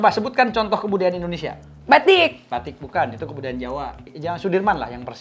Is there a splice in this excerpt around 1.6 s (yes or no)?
no